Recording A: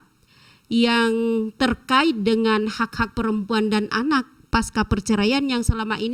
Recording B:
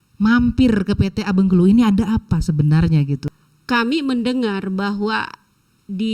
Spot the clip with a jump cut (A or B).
B